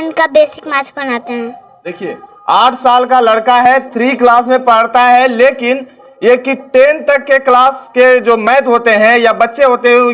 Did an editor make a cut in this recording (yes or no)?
no